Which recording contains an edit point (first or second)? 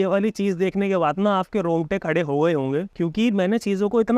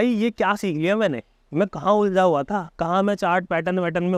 first